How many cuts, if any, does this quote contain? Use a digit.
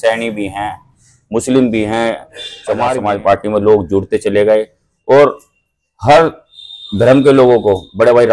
1